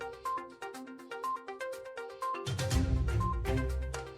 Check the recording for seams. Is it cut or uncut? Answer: cut